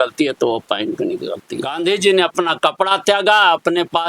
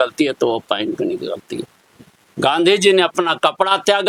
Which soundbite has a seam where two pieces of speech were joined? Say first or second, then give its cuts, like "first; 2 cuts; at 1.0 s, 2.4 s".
first; 1 cut; at 1.7 s